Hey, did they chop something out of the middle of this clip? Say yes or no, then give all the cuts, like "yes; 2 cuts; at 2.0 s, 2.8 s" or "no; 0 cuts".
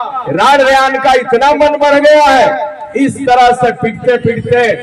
no; 0 cuts